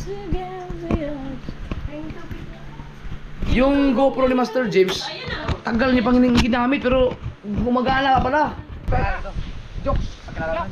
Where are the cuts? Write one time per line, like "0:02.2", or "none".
0:08.7